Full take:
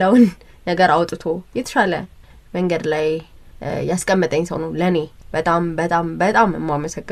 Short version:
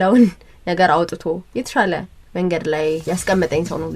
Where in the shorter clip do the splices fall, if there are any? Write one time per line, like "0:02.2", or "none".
0:02.2
0:03.0